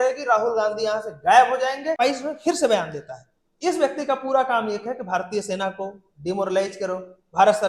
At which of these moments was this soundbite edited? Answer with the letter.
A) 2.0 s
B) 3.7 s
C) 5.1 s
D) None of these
A